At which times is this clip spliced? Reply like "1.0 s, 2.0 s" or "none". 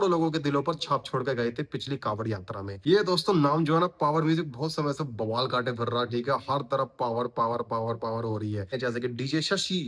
2.7 s, 8.7 s